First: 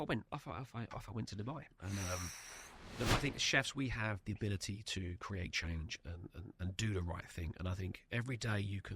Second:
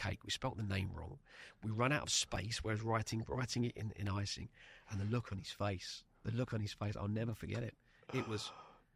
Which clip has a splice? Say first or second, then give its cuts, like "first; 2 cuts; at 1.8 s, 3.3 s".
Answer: first; 1 cut; at 2.8 s